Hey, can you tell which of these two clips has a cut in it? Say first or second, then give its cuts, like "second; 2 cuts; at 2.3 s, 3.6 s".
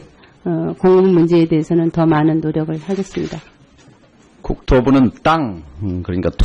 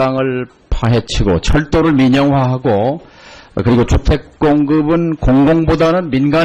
first; 1 cut; at 1.7 s